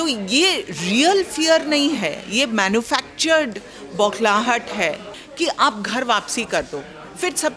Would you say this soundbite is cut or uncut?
cut